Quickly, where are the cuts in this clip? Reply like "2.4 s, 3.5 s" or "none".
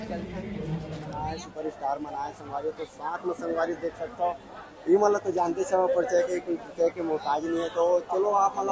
1.0 s